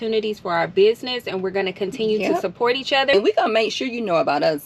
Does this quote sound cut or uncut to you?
cut